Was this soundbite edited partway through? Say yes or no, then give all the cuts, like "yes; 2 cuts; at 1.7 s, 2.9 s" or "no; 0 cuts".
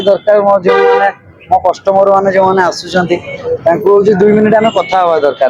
no; 0 cuts